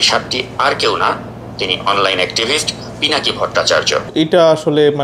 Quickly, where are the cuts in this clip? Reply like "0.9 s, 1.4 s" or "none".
4.1 s